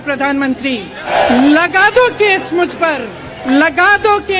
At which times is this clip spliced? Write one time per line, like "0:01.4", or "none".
0:01.0
0:03.4